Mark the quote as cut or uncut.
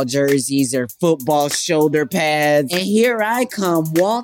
cut